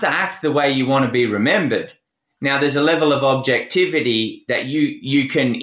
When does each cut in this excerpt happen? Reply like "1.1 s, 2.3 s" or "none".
none